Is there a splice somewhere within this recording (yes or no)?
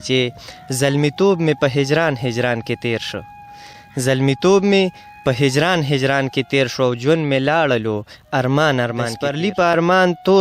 yes